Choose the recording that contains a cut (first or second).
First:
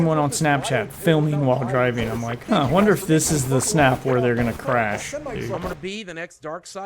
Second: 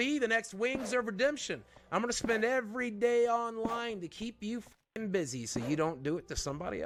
first